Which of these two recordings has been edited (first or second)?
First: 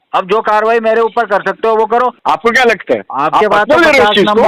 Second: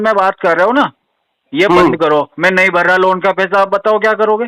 first